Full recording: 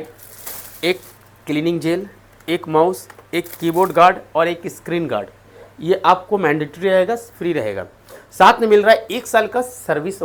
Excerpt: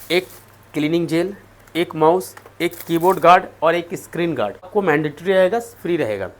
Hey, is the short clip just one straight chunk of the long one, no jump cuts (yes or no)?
no